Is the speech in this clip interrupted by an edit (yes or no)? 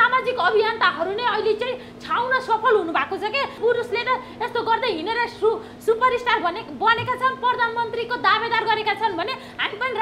yes